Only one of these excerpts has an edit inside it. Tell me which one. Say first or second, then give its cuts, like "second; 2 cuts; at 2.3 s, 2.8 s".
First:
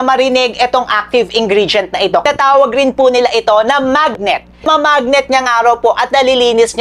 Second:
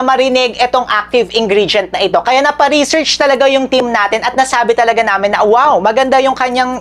first; 2 cuts; at 2.2 s, 4.7 s